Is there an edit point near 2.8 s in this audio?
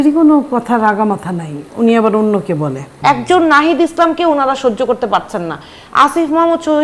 yes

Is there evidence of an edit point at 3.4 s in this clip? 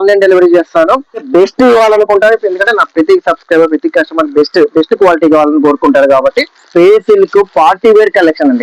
no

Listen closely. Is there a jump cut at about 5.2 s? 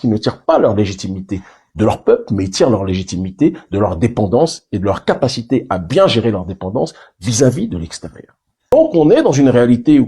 no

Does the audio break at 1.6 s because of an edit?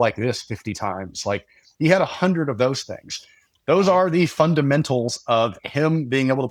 no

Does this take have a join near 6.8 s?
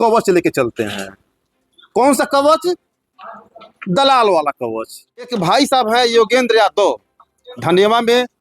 no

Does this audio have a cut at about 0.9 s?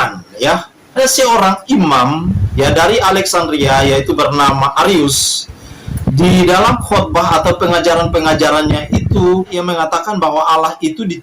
yes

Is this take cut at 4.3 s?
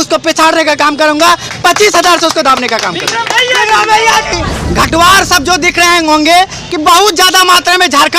yes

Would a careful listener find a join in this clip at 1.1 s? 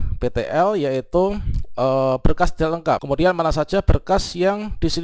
no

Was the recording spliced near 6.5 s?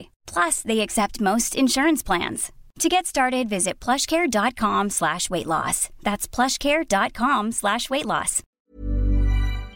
no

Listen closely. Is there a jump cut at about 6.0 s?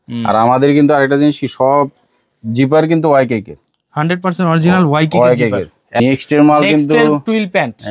yes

